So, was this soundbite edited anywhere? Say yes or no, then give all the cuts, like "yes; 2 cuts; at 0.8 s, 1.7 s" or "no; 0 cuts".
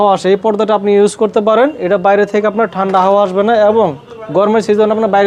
no; 0 cuts